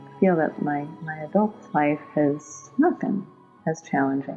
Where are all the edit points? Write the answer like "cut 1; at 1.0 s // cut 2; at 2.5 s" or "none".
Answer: none